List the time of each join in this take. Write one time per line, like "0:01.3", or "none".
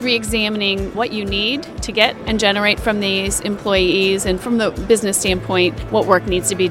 0:00.9
0:05.8